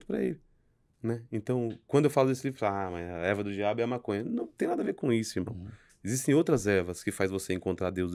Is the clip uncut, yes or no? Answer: yes